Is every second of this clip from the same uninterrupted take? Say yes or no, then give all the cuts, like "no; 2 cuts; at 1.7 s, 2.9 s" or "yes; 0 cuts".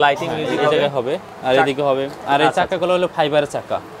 yes; 0 cuts